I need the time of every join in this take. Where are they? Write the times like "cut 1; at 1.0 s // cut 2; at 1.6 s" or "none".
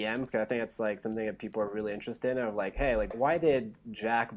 cut 1; at 3.1 s